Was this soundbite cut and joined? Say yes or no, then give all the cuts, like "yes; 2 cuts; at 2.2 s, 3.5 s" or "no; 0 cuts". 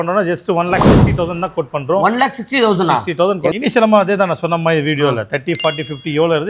yes; 1 cut; at 3.5 s